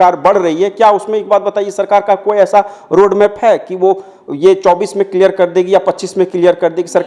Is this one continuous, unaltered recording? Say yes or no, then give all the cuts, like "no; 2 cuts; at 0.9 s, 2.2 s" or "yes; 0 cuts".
yes; 0 cuts